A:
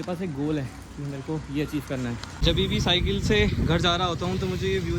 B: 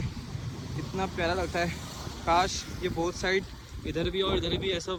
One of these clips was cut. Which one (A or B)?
A